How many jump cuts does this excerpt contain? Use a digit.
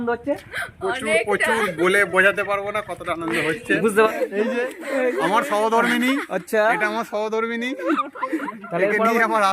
1